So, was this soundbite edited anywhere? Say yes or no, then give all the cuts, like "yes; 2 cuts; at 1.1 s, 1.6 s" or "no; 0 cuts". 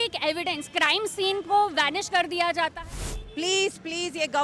yes; 1 cut; at 2.8 s